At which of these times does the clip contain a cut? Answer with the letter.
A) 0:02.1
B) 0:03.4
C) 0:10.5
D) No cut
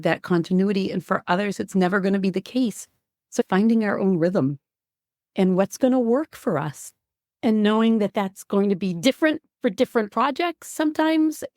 B